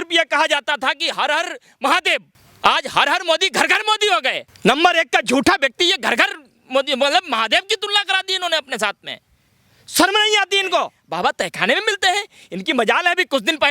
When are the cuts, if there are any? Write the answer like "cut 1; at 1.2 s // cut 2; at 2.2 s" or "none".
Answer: cut 1; at 2.4 s // cut 2; at 4.5 s // cut 3; at 11.0 s